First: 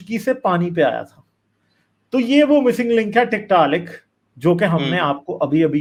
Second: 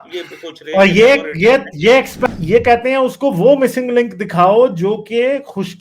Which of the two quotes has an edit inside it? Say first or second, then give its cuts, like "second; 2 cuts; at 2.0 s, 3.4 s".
second; 1 cut; at 2.2 s